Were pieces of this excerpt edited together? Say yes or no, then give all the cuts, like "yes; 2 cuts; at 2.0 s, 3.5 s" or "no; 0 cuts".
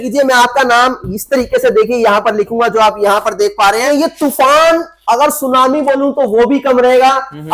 yes; 1 cut; at 3.8 s